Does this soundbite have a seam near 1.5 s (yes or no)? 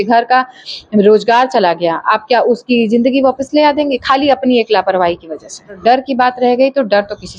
no